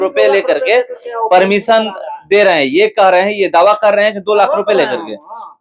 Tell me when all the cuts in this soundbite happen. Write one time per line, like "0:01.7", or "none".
none